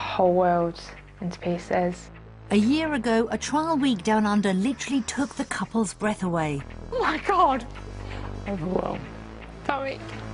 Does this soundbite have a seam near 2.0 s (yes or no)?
yes